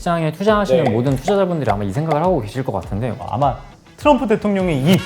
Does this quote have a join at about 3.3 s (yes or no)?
yes